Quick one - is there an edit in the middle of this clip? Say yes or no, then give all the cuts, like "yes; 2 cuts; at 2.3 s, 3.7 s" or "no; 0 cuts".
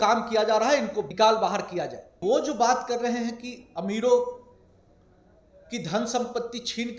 yes; 2 cuts; at 1.0 s, 2.2 s